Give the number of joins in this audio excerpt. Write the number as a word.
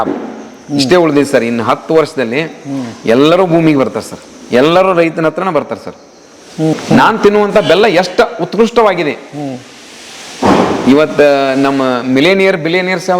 one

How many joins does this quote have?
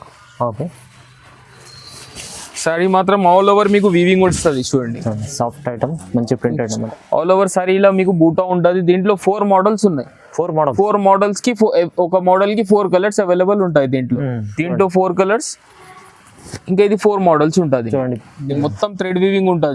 two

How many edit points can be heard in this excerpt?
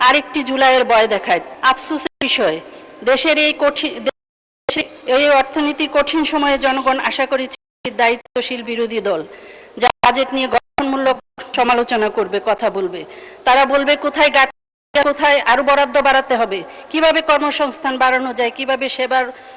one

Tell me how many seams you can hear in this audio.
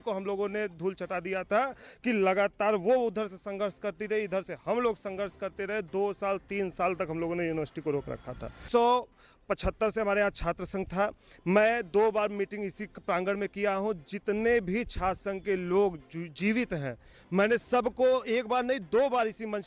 one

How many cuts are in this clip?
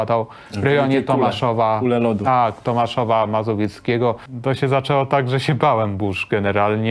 one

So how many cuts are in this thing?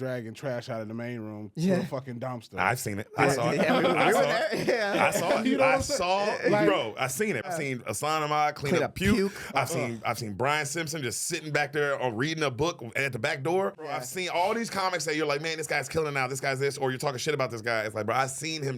two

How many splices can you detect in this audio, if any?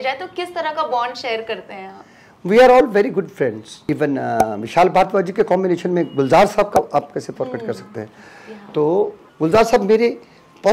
two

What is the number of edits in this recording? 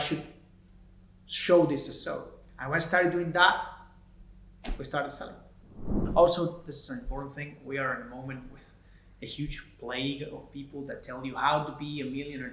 one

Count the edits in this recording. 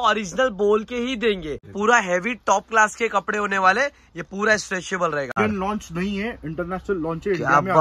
two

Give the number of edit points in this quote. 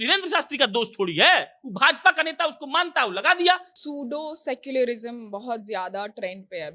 one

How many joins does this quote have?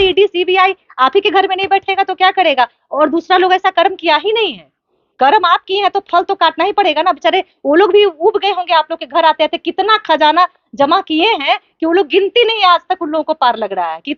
zero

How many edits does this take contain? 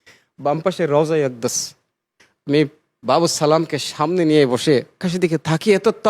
one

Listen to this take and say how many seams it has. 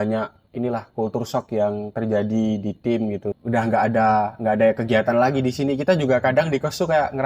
one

